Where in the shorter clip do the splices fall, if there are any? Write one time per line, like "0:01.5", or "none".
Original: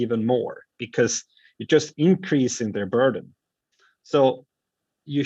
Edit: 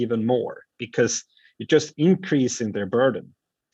none